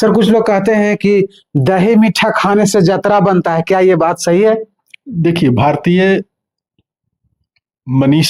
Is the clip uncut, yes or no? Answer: yes